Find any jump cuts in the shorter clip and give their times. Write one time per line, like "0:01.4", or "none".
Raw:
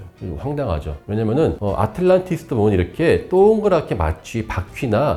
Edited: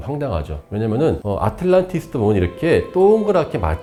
none